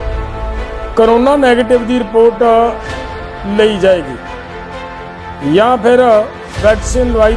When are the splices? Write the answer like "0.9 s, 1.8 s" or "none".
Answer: 0.9 s